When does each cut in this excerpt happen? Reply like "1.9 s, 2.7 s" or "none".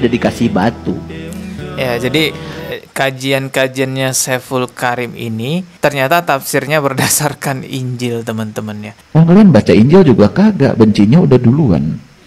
5.7 s, 8.9 s

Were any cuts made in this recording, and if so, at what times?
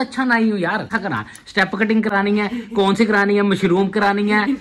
0.9 s

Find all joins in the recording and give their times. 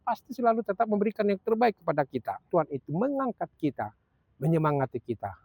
2.5 s

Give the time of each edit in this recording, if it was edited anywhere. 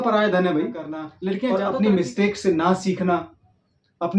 1.4 s

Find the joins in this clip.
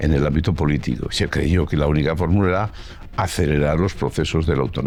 none

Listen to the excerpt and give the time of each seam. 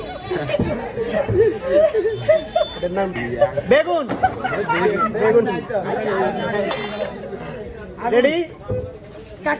3.2 s

